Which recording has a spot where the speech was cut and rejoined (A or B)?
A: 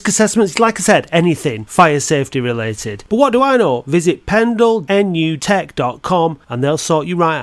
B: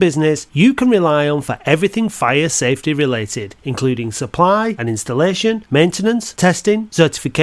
A